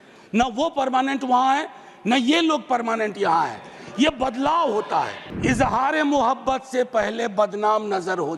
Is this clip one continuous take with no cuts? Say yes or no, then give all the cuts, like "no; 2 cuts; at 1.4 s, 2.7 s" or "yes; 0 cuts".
no; 1 cut; at 5.2 s